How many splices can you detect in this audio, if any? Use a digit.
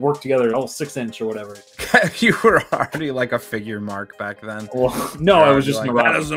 1